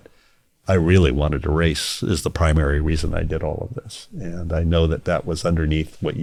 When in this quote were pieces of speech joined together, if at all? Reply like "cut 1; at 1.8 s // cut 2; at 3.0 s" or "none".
none